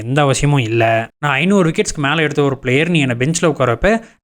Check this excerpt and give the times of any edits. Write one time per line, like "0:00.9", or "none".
0:01.1